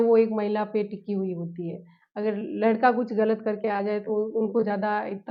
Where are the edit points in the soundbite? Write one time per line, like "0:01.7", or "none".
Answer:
none